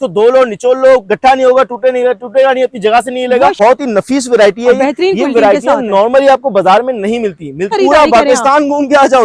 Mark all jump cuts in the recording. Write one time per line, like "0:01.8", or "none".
0:03.5
0:07.7